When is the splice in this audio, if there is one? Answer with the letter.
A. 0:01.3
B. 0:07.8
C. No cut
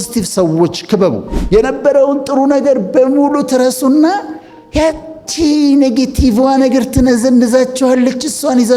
A